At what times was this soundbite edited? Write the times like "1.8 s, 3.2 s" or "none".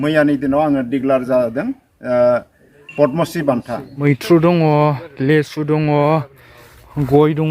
4.0 s